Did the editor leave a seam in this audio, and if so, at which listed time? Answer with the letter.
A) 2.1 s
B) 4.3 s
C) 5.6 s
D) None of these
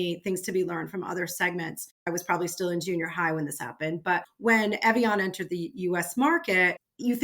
A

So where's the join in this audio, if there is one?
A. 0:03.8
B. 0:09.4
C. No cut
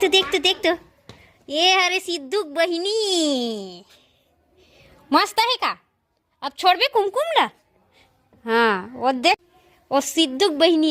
B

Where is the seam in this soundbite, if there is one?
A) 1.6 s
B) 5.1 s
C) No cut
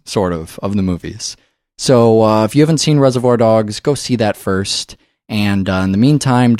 B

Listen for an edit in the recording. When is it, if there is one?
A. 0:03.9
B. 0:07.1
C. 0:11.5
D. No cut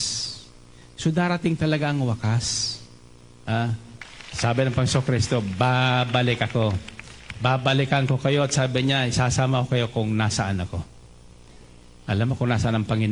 A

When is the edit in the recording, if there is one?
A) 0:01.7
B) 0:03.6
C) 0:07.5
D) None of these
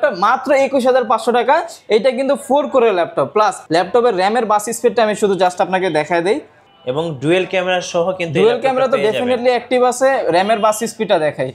D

